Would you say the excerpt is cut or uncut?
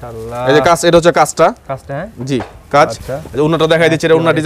uncut